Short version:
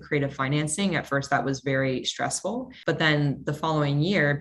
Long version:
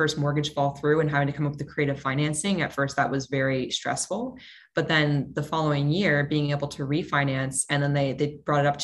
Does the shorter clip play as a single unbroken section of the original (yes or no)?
no